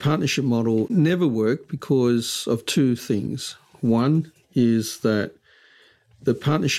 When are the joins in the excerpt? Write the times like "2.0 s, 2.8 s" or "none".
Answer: 0.9 s